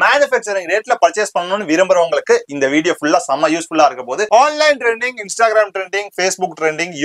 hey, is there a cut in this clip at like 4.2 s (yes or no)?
yes